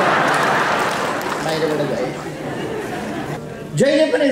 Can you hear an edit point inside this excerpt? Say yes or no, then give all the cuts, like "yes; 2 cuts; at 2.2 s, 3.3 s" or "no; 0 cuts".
yes; 1 cut; at 3.4 s